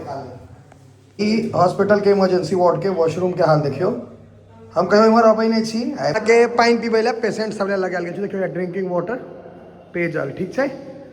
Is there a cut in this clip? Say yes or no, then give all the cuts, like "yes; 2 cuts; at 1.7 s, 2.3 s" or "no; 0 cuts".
yes; 2 cuts; at 1.2 s, 6.1 s